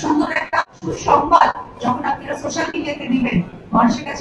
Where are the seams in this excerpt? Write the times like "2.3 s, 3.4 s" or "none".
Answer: none